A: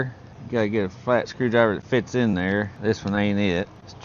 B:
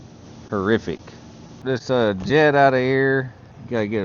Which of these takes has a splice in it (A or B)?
B